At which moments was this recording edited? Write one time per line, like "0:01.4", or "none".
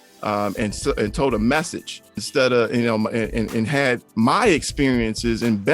0:02.3
0:04.1

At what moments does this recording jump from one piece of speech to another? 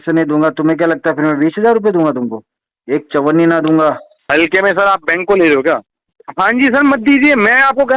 0:04.1
0:06.1

